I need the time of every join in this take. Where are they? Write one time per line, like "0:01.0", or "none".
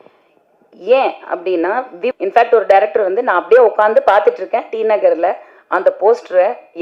0:02.1